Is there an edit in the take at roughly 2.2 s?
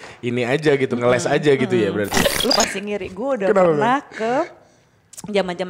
yes; 1 cut; at 2.2 s

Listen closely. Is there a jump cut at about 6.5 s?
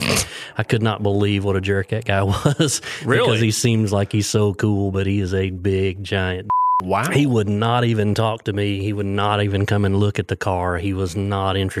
yes; 1 cut; at 6.5 s

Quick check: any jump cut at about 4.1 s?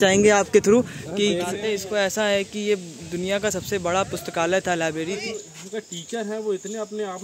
no; 2 cuts; at 1.6 s, 5.5 s

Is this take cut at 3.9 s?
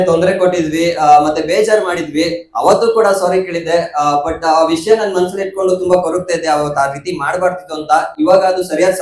no; 0 cuts

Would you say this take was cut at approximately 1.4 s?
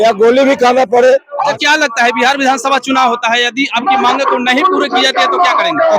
yes; 1 cut; at 1.4 s

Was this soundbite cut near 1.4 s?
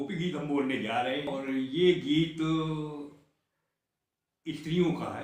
yes; 1 cut; at 1.4 s

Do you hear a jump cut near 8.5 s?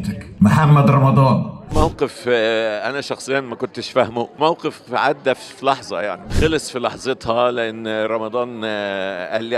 no; 3 cuts; at 1.7 s, 4.3 s, 6.4 s

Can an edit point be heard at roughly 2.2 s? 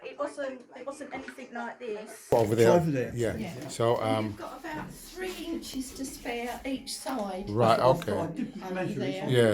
yes; 1 cut; at 2.2 s

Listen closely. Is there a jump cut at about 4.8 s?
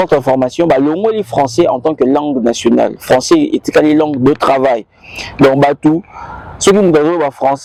no; 0 cuts

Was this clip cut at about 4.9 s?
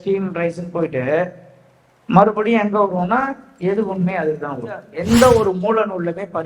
yes; 1 cut; at 4.9 s

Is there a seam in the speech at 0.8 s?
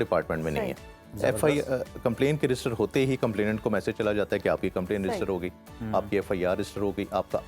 no; 0 cuts

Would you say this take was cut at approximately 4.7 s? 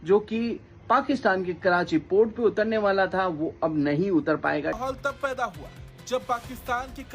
yes; 1 cut; at 4.7 s

